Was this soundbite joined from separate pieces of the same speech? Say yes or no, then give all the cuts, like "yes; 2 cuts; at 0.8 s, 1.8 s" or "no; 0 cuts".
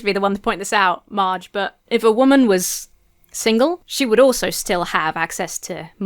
yes; 2 cuts; at 1.8 s, 3.9 s